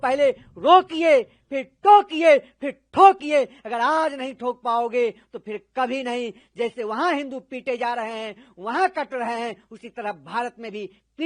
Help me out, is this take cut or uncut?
uncut